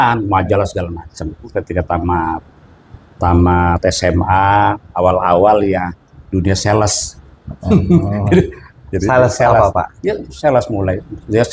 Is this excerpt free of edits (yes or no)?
no